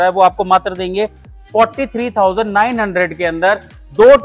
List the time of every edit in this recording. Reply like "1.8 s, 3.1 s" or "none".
none